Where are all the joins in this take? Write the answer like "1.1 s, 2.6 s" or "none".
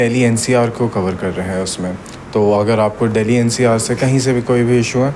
none